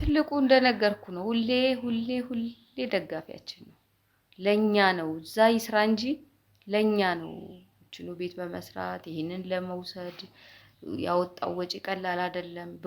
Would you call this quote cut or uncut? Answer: uncut